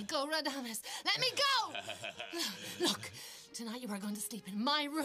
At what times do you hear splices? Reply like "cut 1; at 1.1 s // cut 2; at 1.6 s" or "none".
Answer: cut 1; at 2.8 s